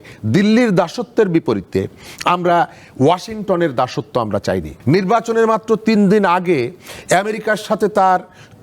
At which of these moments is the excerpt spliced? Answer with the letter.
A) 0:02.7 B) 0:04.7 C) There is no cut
B